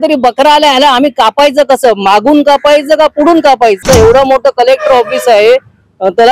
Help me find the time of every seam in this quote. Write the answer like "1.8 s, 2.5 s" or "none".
3.8 s